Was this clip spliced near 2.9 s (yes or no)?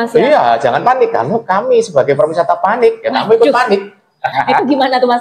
no